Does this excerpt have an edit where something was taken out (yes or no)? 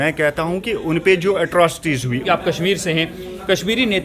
yes